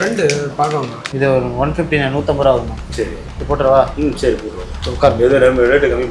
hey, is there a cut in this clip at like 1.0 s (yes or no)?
yes